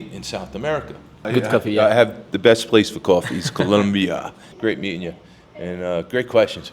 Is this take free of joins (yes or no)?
no